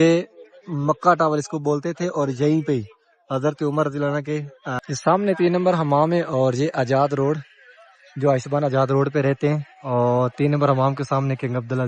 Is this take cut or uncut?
cut